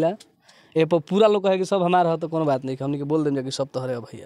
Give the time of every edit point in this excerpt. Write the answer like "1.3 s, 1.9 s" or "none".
none